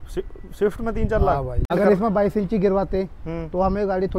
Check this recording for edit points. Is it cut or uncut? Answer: cut